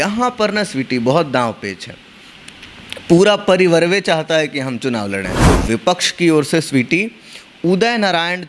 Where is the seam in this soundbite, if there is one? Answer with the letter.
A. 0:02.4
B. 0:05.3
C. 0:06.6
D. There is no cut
B